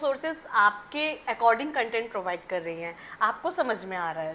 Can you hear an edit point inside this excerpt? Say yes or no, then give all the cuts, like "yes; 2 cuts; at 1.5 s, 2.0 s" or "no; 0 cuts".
no; 0 cuts